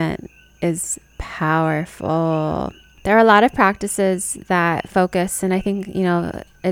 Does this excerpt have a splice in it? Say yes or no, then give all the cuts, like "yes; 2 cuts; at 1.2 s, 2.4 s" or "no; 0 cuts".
yes; 1 cut; at 2.8 s